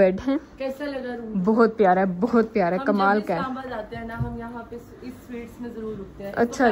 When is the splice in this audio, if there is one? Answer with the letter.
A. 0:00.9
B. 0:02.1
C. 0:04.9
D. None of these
D